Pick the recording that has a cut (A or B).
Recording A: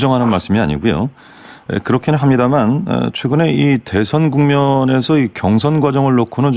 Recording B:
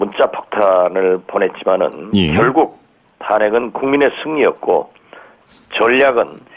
B